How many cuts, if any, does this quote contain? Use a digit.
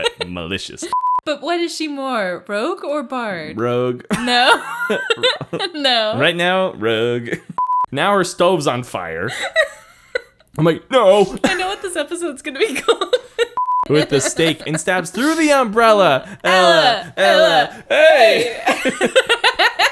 3